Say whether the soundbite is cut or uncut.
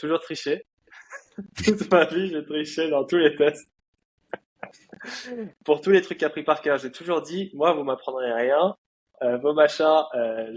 uncut